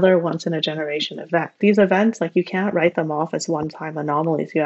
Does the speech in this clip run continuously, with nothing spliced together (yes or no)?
no